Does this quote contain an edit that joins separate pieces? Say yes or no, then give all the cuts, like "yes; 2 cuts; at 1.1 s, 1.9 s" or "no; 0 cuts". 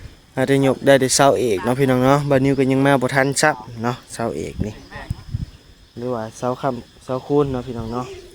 no; 0 cuts